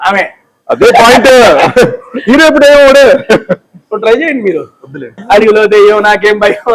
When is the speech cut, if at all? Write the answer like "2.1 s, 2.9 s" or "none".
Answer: 5.2 s